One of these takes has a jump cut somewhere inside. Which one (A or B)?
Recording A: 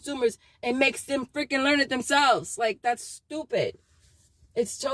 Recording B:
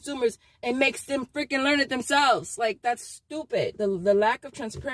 B